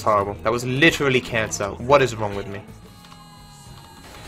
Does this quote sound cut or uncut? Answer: cut